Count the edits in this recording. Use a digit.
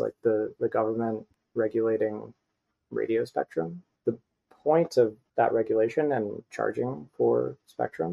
2